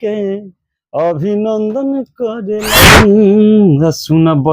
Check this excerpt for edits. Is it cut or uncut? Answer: cut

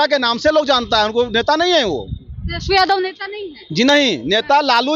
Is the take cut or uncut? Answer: uncut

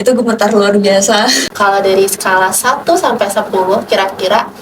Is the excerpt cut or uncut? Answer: cut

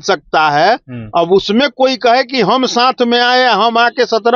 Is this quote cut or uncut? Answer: uncut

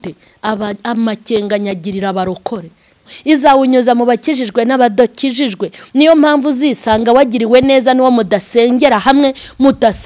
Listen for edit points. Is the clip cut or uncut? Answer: cut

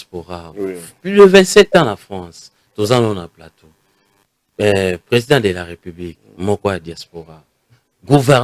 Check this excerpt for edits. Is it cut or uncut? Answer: uncut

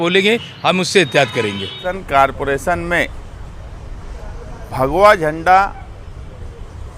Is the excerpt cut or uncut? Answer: cut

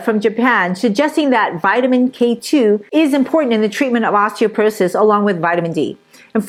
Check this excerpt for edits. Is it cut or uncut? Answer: uncut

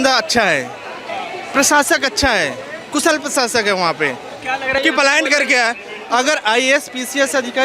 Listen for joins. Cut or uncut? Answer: cut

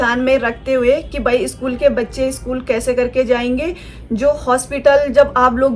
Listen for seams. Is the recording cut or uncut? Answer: uncut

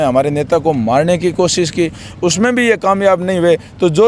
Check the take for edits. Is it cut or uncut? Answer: uncut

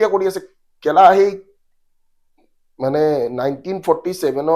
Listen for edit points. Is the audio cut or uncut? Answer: uncut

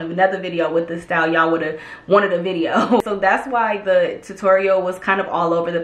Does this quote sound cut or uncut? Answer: cut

